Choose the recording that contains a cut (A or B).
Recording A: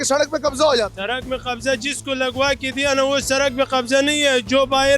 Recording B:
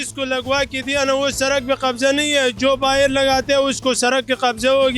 A